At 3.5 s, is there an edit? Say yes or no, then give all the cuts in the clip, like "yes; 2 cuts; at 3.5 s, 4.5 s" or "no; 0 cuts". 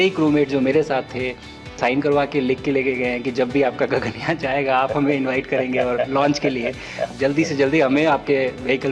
no; 2 cuts; at 1.8 s, 7.1 s